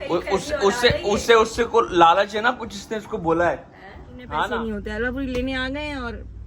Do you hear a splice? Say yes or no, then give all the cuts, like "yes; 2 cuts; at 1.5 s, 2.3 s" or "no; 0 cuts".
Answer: yes; 1 cut; at 4.4 s